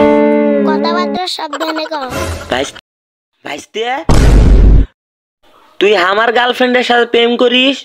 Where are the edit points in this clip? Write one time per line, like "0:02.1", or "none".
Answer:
0:02.7

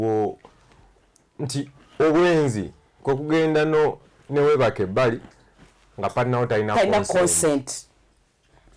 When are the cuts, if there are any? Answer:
none

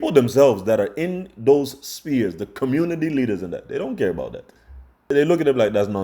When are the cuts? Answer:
0:05.1

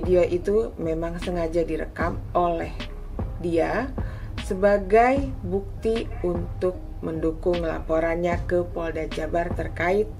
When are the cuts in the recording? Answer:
none

